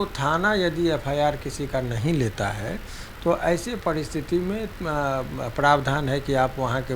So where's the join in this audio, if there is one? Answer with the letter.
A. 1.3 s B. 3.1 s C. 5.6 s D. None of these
D